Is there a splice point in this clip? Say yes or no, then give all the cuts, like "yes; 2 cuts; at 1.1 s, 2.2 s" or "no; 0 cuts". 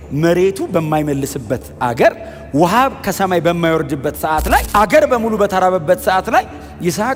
no; 0 cuts